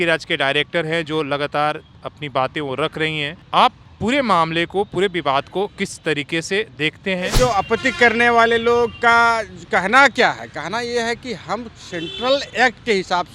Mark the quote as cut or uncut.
cut